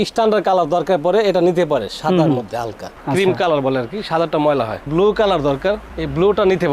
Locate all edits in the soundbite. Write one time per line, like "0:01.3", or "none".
0:04.9